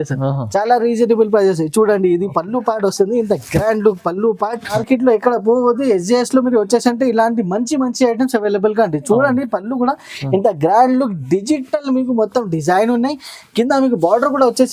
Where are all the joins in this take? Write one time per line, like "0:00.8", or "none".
0:04.8